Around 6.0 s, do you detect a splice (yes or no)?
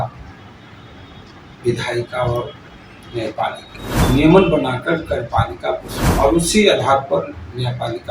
yes